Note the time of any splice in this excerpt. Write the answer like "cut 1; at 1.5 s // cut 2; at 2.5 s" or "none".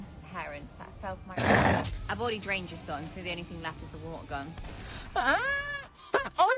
cut 1; at 2.0 s